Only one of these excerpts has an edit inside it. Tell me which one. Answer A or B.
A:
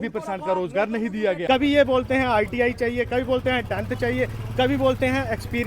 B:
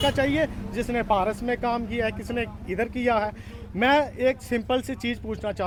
A